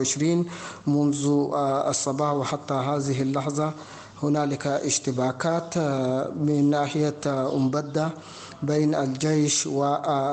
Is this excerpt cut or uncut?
uncut